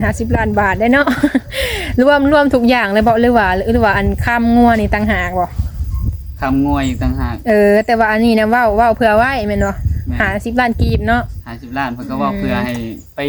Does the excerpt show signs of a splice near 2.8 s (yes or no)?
no